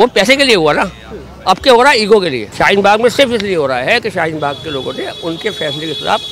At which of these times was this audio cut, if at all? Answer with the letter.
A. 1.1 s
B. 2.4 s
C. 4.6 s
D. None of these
B